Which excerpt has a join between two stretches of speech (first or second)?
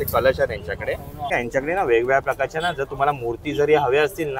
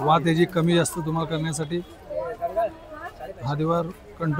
first